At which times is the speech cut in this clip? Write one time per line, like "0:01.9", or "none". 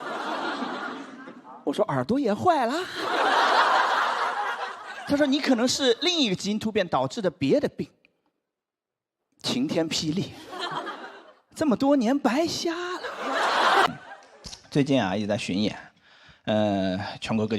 0:13.9